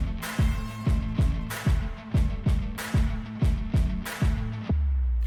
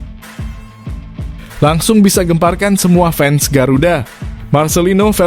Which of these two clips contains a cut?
second; 1 cut; at 1.6 s

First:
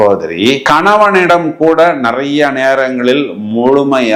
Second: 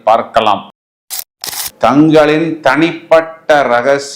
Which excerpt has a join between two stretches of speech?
second; 1 cut; at 1.2 s

